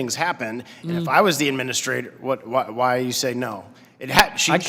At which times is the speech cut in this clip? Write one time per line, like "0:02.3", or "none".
none